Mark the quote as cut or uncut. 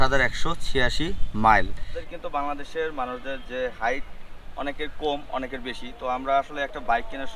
cut